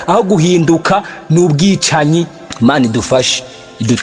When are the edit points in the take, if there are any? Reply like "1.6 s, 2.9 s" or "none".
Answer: 2.4 s

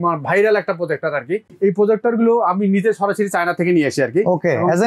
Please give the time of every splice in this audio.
1.5 s

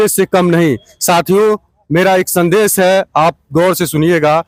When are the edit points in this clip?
none

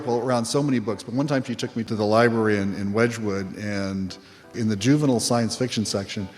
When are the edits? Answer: 1.9 s, 4.6 s

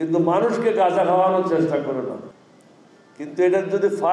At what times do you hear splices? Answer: 2.2 s

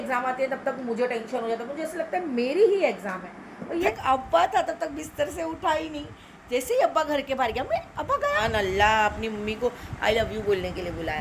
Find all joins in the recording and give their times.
3.9 s, 8.4 s

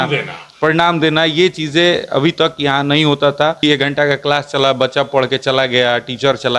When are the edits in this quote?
3.6 s

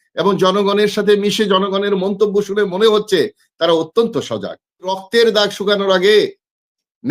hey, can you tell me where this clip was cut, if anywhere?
5.0 s

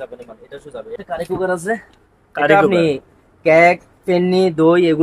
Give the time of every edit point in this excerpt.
1.0 s

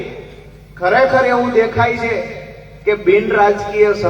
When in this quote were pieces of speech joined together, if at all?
none

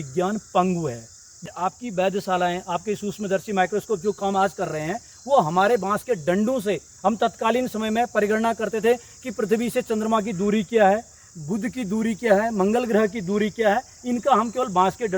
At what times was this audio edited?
1.4 s

